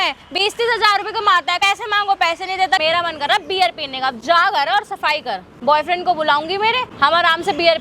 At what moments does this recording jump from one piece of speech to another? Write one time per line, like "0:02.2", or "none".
0:01.6
0:02.8
0:05.5
0:06.9